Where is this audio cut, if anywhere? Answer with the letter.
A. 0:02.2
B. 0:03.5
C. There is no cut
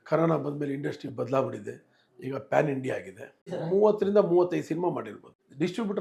B